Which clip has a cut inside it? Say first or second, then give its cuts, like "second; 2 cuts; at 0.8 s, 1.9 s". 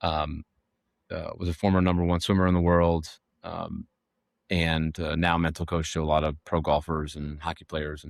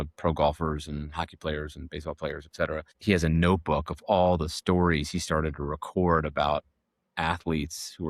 second; 1 cut; at 2.9 s